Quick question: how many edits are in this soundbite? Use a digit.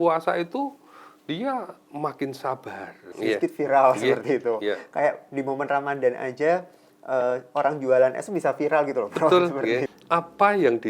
2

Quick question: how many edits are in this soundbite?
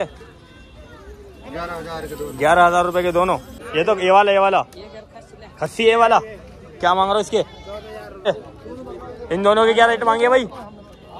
2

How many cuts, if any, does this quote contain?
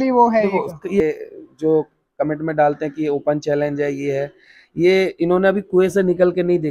1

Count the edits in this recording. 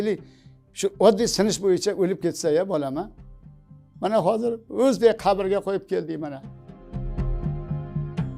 1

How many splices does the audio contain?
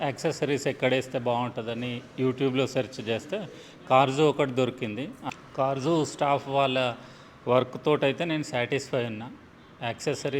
1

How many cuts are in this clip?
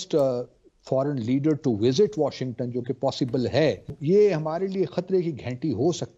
1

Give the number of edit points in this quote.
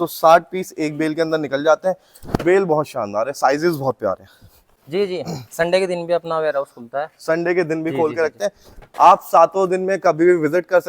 1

